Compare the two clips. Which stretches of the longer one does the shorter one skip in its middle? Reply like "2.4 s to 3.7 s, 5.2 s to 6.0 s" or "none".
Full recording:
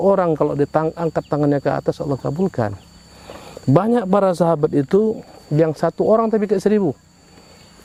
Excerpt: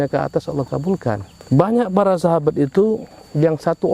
2.8 s to 3.5 s